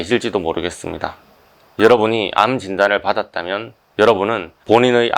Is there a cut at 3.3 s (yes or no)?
no